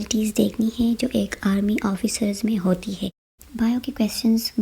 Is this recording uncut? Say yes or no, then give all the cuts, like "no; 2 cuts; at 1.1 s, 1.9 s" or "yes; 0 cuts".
no; 1 cut; at 3.2 s